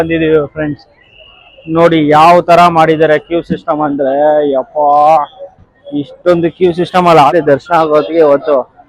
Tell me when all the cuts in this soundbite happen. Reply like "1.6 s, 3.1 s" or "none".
7.3 s